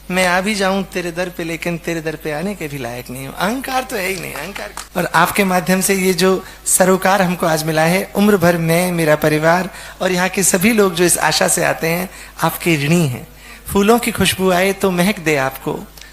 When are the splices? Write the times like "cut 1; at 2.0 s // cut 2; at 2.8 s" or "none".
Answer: cut 1; at 4.7 s